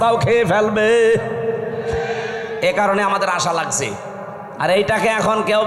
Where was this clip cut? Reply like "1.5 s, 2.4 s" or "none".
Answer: none

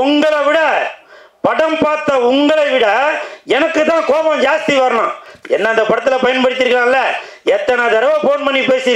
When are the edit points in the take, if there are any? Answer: 5.3 s

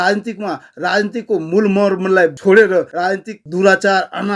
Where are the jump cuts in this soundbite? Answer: 2.4 s, 3.1 s

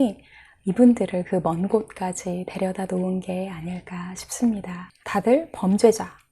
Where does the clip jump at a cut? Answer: 4.9 s

